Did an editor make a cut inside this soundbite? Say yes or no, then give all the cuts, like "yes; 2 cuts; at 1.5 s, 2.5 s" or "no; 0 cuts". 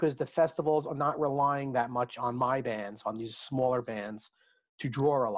no; 0 cuts